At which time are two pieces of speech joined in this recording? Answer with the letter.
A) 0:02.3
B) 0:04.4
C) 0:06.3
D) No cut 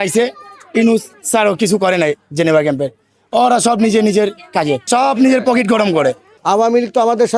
C